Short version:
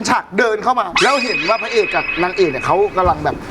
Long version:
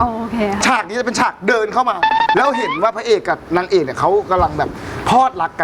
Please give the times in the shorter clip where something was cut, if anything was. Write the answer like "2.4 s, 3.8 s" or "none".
0.9 s